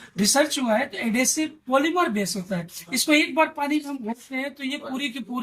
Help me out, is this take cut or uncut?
uncut